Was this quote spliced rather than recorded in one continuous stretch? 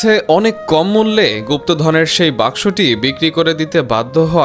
no; 0 cuts

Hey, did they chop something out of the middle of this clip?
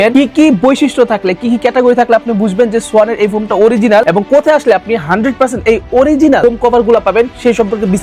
no; 0 cuts

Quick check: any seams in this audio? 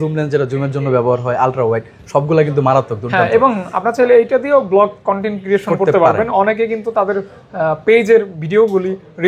no; 0 cuts

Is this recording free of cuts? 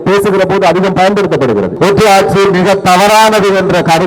no; 1 cut; at 1.7 s

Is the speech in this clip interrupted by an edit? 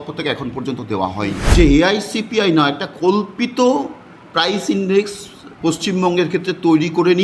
yes; 1 cut; at 1.4 s

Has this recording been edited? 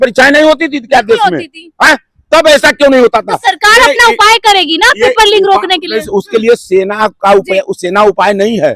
no; 0 cuts

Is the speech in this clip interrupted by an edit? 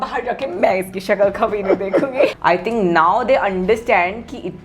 yes; 1 cut; at 2.3 s

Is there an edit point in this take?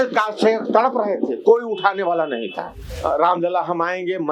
yes; 1 cut; at 2.8 s

